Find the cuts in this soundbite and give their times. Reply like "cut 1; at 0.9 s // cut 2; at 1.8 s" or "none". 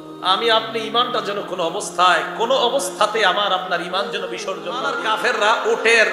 cut 1; at 5.0 s